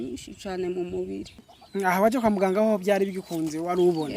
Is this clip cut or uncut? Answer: cut